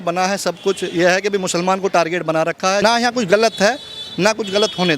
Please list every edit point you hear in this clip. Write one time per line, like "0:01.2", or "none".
0:02.8